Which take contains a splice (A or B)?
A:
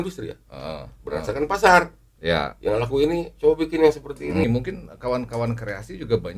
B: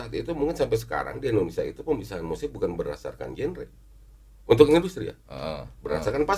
A